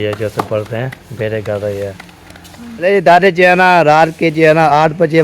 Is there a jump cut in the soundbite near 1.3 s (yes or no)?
no